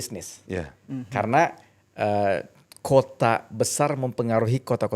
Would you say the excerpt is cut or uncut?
uncut